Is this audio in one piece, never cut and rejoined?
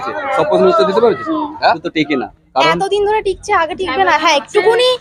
no; 1 cut; at 1.8 s

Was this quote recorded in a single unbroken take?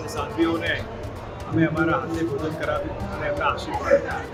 yes; 0 cuts

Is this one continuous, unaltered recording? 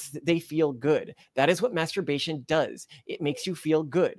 yes; 0 cuts

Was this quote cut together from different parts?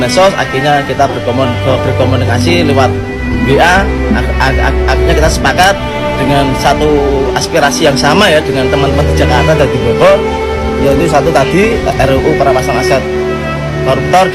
no; 0 cuts

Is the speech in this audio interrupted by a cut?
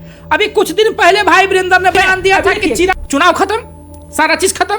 yes; 1 cut; at 3.0 s

